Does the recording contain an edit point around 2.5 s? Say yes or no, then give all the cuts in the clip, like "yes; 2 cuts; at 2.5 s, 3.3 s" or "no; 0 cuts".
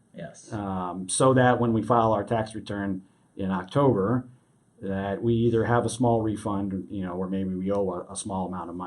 no; 0 cuts